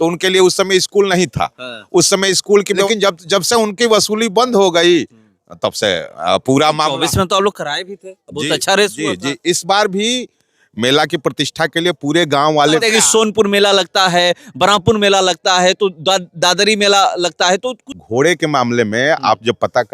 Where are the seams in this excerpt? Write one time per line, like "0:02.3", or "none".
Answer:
0:02.9
0:12.8
0:17.8